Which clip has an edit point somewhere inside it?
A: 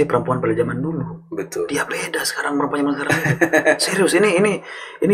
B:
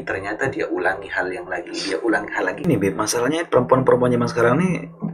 B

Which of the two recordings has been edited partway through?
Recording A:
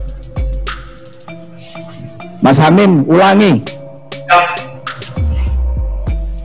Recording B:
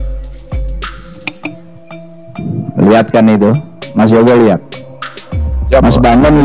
B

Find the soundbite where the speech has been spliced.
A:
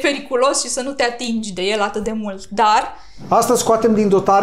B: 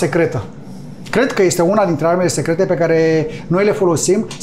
A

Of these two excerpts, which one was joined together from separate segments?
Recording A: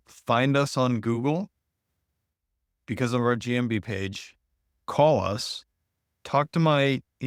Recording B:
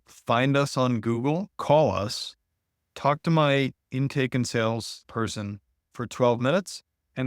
B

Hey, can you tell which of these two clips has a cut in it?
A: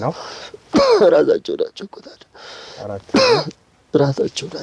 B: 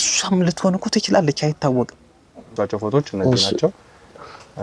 B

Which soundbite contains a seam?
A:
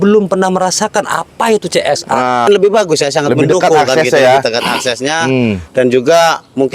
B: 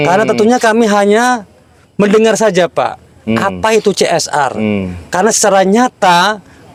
A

